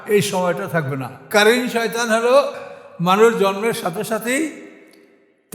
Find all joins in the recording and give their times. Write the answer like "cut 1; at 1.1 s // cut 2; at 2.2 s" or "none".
cut 1; at 1.3 s // cut 2; at 2.6 s